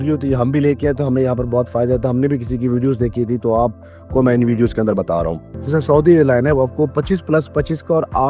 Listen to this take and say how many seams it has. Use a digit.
1